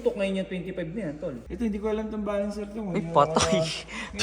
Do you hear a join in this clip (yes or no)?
yes